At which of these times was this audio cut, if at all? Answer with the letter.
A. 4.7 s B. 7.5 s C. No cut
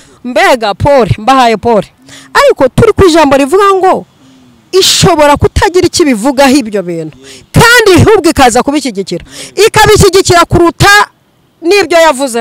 C